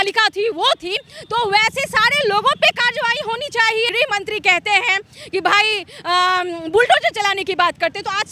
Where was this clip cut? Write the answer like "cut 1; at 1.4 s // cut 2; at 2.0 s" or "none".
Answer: cut 1; at 3.9 s